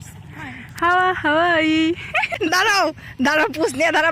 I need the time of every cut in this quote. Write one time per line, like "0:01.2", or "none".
0:02.3